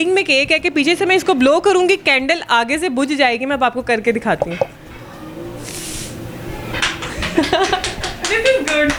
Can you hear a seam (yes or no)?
no